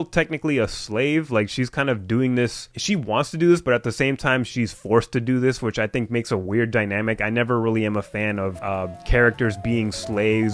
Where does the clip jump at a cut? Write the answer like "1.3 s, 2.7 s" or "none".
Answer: none